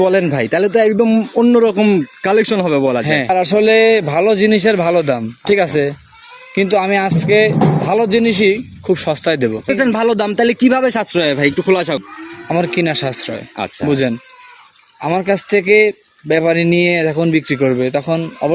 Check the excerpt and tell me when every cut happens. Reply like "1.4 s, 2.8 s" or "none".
3.3 s, 12.0 s